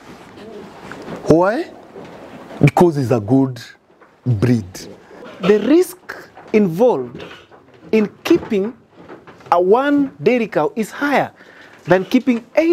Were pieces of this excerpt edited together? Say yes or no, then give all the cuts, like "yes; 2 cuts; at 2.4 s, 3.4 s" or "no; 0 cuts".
yes; 1 cut; at 5.3 s